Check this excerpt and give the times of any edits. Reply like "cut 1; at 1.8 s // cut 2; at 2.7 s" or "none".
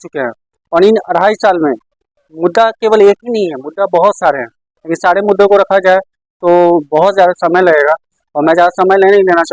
none